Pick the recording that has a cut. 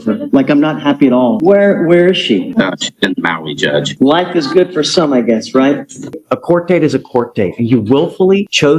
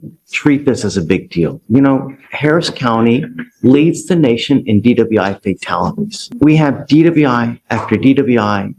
first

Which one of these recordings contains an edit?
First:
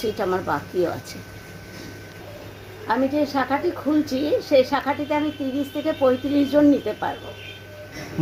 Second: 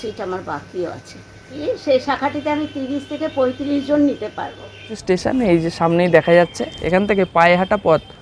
second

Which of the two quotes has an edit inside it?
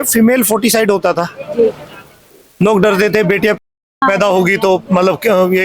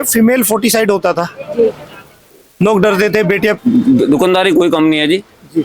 second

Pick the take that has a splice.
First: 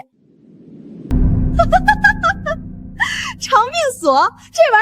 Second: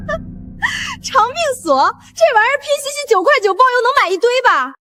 first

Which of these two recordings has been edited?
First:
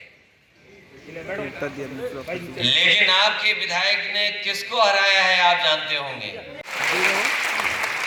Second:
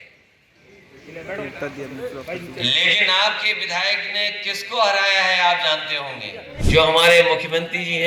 second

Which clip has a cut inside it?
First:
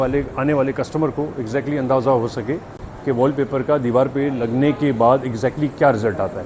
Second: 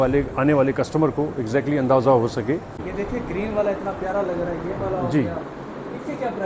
second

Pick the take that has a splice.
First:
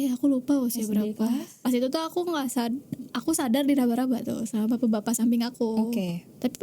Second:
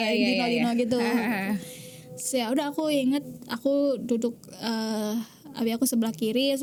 first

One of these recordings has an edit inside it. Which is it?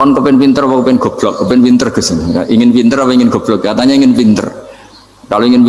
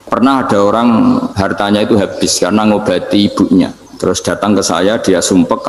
second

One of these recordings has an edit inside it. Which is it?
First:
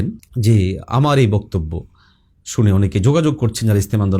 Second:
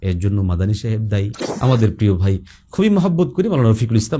second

